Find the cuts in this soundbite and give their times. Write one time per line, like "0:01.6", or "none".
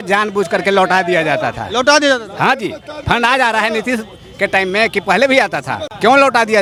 none